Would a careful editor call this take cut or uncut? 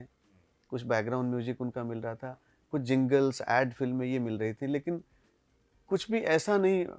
uncut